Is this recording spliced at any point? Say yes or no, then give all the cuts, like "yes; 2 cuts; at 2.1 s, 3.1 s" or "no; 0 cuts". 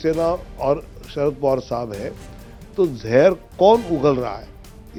no; 0 cuts